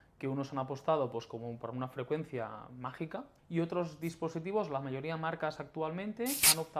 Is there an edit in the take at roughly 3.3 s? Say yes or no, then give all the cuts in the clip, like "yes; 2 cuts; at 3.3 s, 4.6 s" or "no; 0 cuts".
yes; 1 cut; at 3.3 s